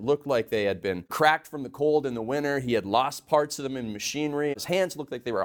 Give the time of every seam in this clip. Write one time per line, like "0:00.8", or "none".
0:01.1
0:04.5